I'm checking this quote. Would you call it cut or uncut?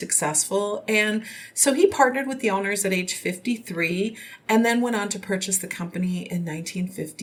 uncut